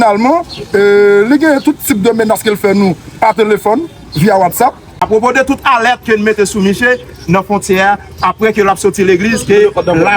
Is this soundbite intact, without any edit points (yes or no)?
no